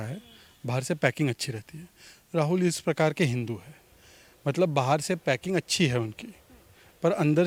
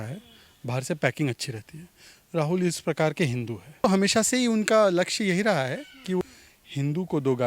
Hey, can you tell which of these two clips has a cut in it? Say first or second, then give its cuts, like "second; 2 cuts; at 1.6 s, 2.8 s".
second; 2 cuts; at 3.8 s, 6.2 s